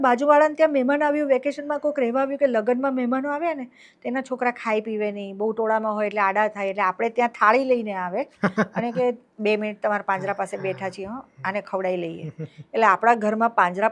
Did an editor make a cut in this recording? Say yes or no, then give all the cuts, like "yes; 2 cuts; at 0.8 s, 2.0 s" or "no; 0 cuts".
no; 0 cuts